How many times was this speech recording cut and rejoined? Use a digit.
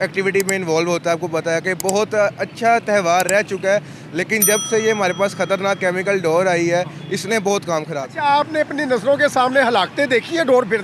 1